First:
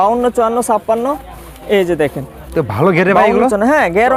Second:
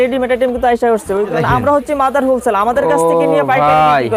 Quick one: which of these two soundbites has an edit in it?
second; 1 cut; at 1.3 s

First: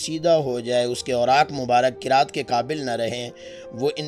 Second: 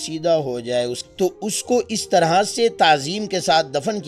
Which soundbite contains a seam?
second; 1 cut; at 1.0 s

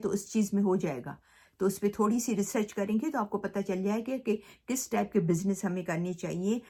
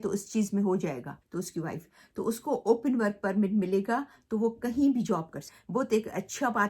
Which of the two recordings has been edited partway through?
second; 2 cuts; at 1.2 s, 5.6 s

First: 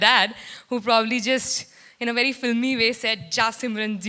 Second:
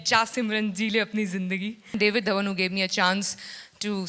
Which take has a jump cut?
second; 1 cut; at 2.0 s

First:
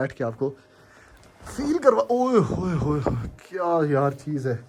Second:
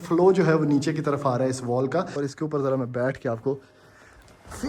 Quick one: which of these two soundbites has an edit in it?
second; 1 cut; at 2.1 s

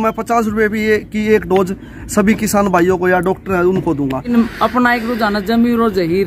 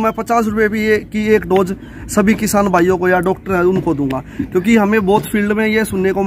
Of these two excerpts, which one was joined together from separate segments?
first; 1 cut; at 4.2 s

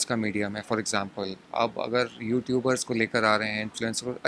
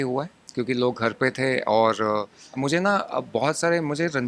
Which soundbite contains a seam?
second; 1 cut; at 2.4 s

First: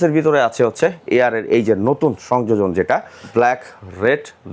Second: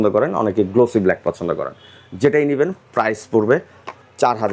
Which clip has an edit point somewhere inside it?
first; 1 cut; at 3.2 s

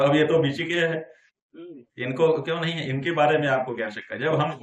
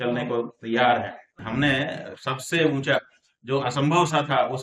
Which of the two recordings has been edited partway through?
second; 1 cut; at 1.4 s

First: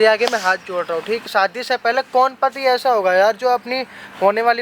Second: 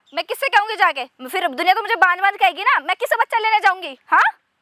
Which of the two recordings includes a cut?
first; 1 cut; at 1.3 s

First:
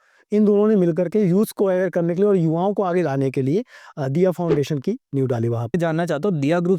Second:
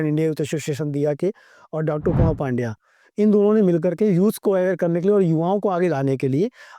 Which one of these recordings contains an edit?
first; 1 cut; at 5.7 s

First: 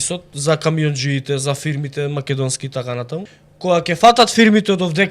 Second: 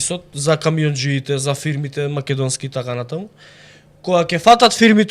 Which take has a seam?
first; 1 cut; at 3.4 s

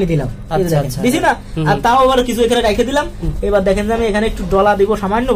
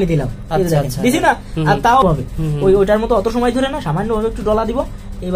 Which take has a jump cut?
second; 1 cut; at 2.0 s

